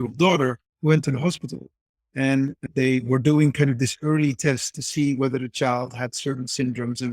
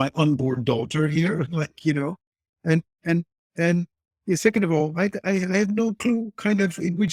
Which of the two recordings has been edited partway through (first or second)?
first